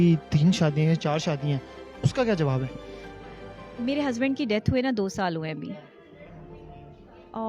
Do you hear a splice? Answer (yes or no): no